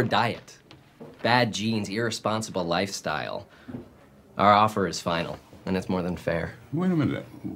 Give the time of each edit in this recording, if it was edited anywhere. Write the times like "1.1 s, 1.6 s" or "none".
6.3 s